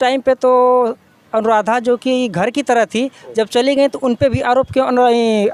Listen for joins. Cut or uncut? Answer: uncut